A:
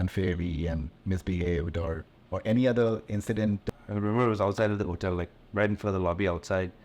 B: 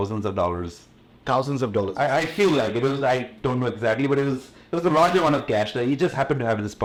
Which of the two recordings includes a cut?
A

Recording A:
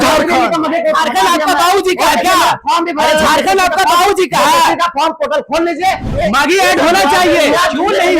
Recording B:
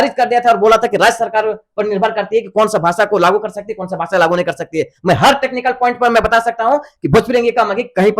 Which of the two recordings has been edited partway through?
A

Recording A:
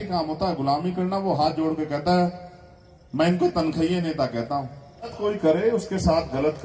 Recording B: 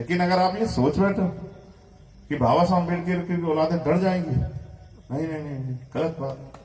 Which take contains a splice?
A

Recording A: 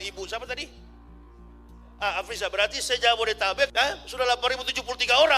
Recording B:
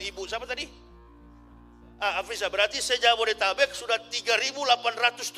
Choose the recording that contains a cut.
A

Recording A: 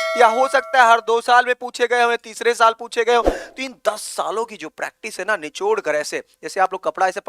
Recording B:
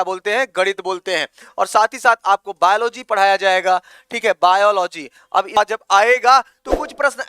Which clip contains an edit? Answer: B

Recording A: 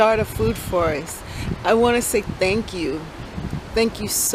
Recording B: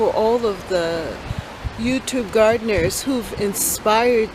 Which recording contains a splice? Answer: B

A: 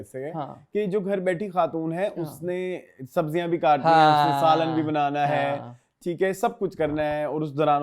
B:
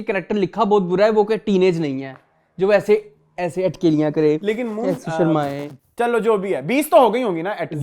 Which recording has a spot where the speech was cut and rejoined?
B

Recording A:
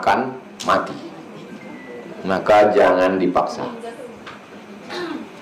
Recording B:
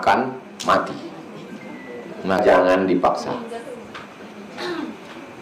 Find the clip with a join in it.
B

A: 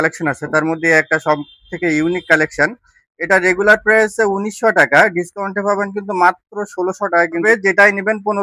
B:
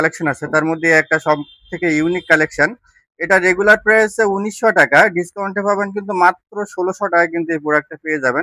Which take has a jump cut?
A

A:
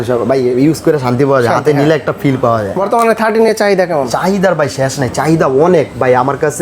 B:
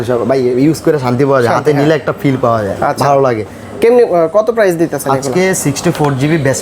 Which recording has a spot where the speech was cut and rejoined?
A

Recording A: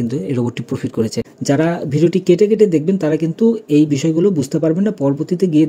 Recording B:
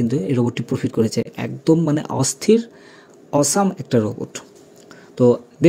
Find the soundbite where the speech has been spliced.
A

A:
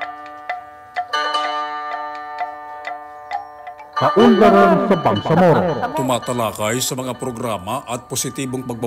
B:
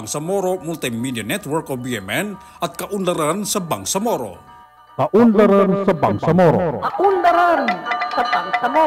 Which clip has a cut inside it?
A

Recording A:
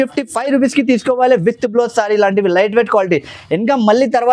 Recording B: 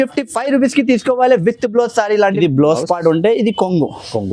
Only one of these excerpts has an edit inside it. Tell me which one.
B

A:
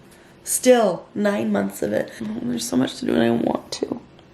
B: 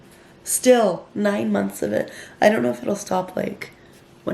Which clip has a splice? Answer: A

